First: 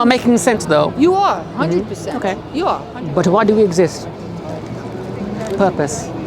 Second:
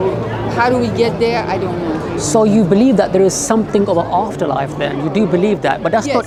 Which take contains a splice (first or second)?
first